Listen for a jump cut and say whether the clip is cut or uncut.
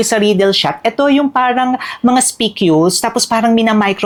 uncut